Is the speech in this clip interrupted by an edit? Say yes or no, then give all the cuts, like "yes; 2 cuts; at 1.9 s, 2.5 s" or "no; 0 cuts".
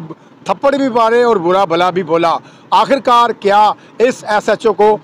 no; 0 cuts